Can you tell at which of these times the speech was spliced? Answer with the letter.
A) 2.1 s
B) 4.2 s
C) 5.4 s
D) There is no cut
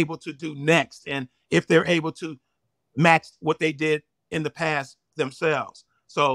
D